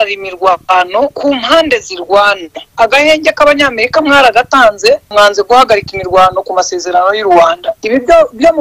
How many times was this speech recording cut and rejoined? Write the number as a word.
two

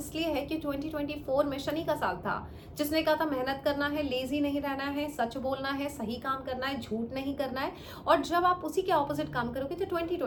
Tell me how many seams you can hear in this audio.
zero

